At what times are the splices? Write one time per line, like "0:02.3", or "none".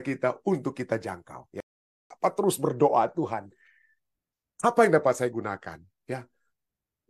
0:02.1

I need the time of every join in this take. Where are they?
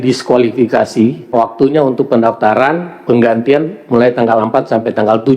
0:01.3

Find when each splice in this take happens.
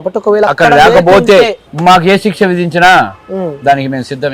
0:01.6

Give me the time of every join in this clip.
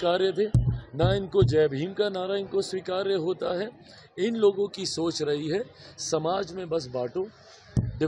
none

